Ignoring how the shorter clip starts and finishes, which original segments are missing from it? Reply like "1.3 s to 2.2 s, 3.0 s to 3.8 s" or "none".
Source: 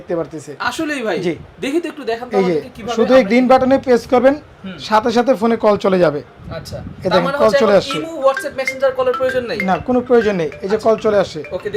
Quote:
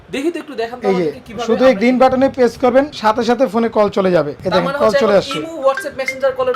4.4 s to 4.8 s, 6.2 s to 7.0 s